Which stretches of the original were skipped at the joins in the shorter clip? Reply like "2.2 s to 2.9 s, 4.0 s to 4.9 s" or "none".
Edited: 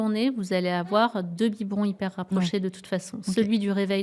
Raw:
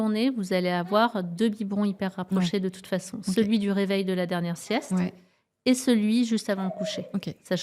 none